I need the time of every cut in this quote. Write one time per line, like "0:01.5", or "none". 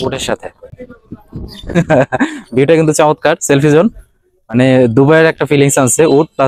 none